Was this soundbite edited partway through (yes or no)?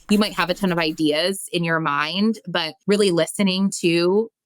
yes